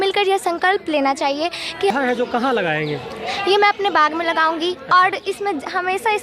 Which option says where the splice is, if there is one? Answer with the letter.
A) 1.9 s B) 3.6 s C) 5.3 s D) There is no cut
A